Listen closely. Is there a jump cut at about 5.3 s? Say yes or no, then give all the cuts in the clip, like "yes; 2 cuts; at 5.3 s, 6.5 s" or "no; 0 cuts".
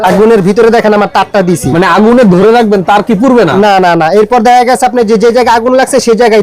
no; 2 cuts; at 1.7 s, 3.5 s